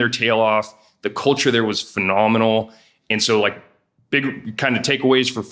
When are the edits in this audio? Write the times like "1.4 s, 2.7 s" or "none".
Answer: none